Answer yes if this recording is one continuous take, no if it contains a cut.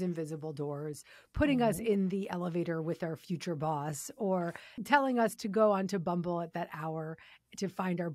no